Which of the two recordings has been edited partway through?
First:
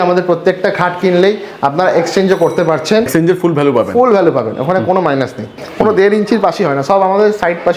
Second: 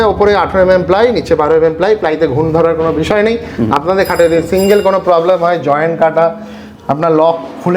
first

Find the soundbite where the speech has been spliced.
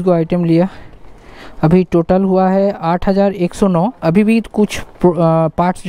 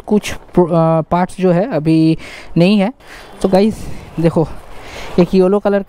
second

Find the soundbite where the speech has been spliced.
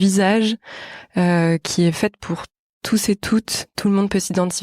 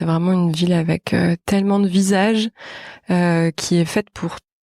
first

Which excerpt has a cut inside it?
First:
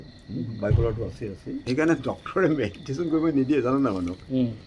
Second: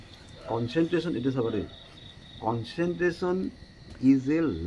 first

